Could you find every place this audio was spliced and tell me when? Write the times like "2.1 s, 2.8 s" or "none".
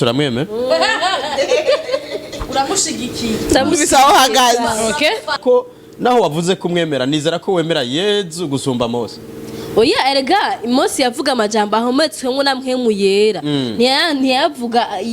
5.4 s